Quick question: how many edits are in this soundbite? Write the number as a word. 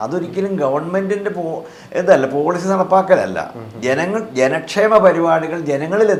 zero